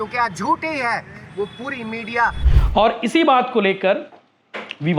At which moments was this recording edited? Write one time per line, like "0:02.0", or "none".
0:02.5